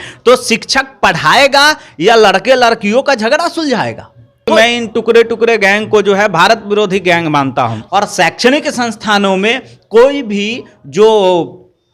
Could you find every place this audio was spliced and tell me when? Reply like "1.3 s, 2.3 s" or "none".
4.6 s, 7.8 s